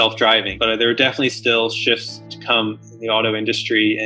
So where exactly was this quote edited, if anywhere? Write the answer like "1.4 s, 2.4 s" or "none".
none